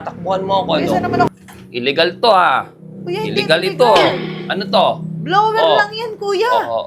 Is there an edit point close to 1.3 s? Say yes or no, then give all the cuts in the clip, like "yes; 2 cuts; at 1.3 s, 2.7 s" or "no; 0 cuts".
yes; 1 cut; at 1.3 s